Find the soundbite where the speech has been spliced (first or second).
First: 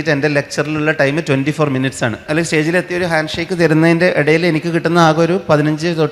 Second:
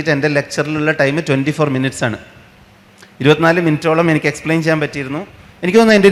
first